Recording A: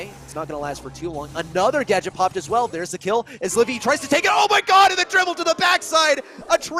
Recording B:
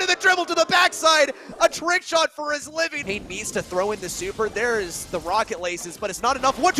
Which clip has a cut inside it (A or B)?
B